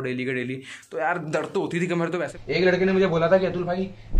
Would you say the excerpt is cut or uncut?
cut